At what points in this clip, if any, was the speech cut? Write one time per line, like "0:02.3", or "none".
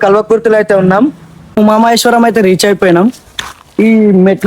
0:01.5